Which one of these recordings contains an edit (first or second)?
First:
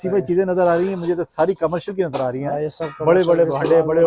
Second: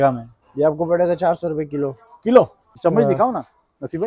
second